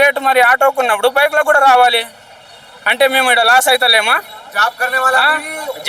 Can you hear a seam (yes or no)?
no